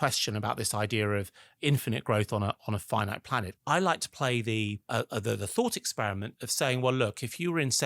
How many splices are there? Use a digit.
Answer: 3